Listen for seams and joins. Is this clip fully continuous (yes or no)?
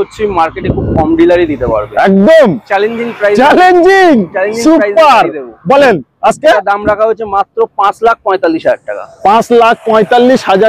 yes